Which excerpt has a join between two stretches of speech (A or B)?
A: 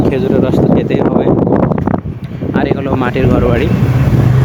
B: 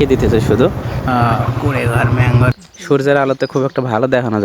B